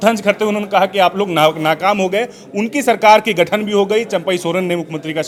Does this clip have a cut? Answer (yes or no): no